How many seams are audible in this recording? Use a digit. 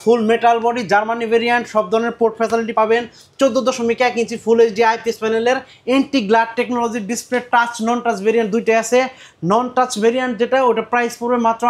1